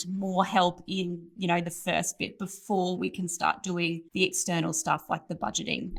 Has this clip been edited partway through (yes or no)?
no